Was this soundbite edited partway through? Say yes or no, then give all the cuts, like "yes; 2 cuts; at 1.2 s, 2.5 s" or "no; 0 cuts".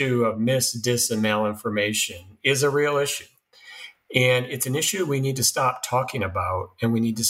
no; 0 cuts